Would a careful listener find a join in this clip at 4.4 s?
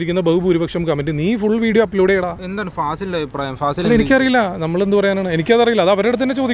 no; 1 cut; at 2.4 s

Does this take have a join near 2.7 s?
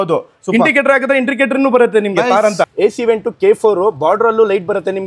yes; 1 cut; at 2.7 s

